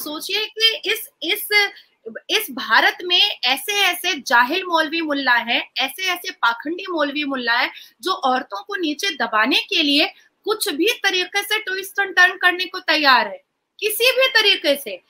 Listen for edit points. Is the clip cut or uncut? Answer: uncut